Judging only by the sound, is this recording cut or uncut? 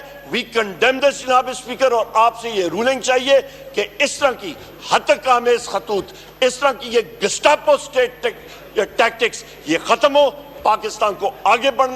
uncut